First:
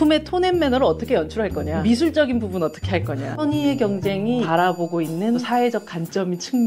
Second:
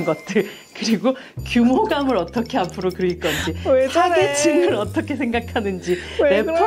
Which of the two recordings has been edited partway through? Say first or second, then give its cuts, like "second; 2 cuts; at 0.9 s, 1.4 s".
first; 4 cuts; at 1.7 s, 3.4 s, 4.5 s, 5.4 s